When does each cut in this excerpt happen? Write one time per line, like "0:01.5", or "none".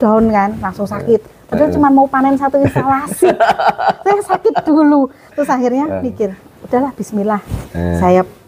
none